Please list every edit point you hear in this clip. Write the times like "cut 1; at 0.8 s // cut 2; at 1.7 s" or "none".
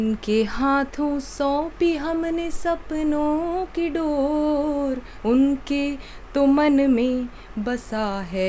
none